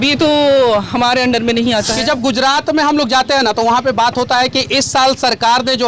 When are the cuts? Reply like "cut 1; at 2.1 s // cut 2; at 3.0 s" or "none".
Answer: cut 1; at 1.9 s